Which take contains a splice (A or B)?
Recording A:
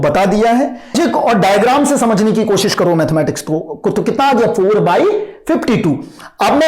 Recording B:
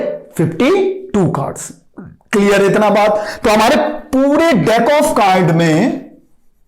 A